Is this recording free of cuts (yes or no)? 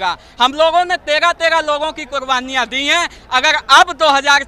yes